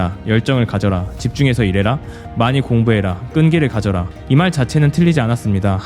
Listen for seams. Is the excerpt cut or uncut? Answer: cut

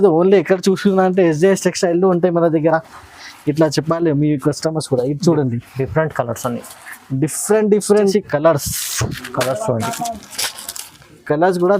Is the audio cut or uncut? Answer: cut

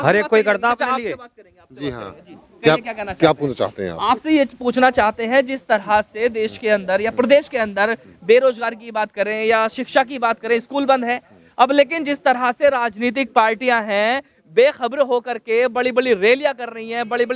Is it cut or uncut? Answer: uncut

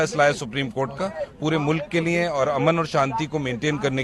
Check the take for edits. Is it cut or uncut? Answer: uncut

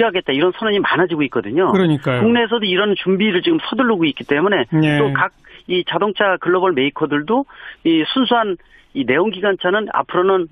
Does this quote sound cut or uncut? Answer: uncut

